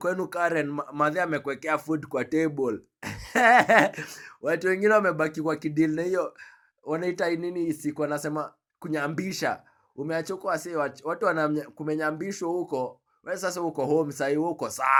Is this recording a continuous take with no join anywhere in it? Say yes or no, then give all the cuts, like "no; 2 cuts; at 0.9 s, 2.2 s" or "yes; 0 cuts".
yes; 0 cuts